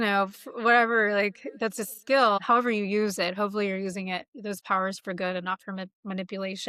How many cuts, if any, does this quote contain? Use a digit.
1